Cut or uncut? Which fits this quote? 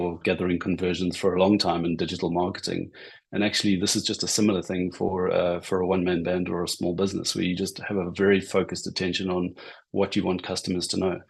uncut